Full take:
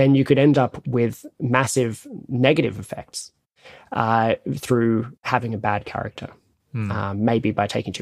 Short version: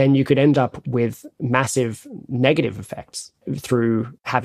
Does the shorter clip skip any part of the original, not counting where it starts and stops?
yes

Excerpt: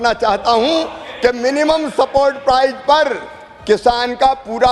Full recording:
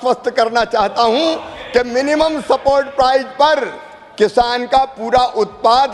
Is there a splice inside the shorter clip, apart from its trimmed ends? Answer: no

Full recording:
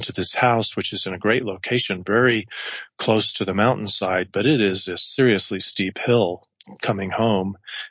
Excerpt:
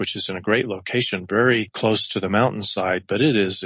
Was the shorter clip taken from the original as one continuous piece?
no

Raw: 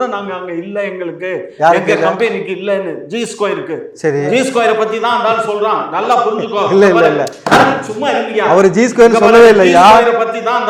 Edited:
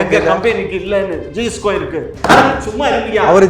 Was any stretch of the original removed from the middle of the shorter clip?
yes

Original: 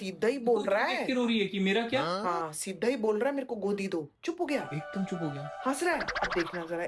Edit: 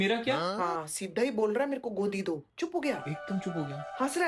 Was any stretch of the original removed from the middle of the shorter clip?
no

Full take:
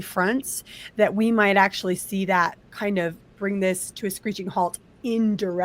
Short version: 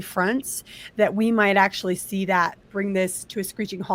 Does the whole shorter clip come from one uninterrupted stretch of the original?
no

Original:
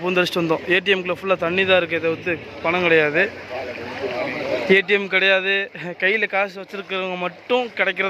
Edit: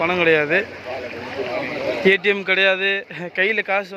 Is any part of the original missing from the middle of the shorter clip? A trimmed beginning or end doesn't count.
no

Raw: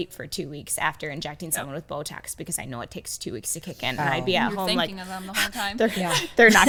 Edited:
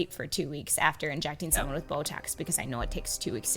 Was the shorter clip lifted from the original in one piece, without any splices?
yes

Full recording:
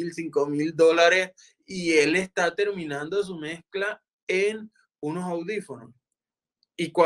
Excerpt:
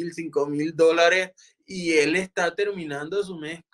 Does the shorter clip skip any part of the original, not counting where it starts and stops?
no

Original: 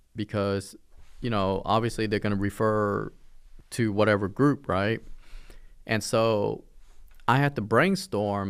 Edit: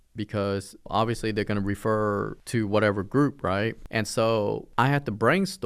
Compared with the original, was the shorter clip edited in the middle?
yes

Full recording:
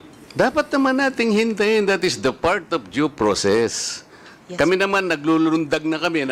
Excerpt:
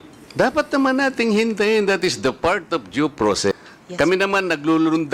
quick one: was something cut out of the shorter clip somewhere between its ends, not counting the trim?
yes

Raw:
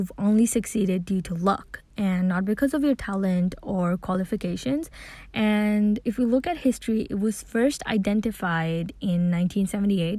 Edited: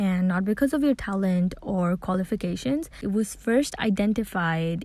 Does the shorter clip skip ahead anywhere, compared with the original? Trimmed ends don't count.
yes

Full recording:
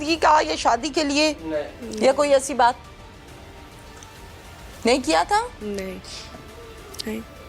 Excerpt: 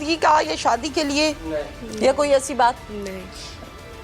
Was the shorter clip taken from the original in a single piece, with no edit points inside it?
no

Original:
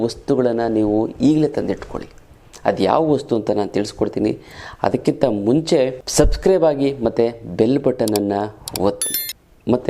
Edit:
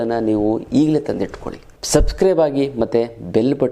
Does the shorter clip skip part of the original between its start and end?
yes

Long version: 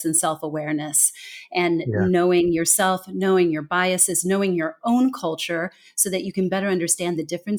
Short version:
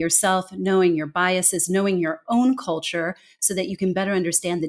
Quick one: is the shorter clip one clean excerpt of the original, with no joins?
yes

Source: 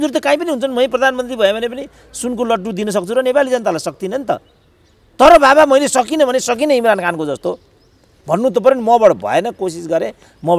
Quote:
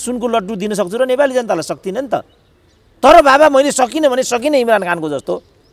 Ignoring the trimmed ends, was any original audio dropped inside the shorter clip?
no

